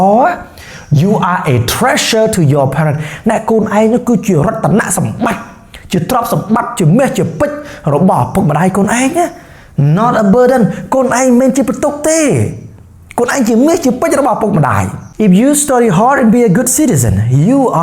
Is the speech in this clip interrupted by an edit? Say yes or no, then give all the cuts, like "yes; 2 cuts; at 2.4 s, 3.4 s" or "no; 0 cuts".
yes; 1 cut; at 15.0 s